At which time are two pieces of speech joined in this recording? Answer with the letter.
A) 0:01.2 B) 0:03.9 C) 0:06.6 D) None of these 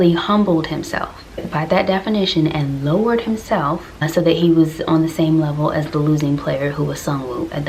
D